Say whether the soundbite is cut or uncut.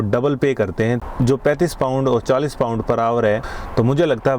cut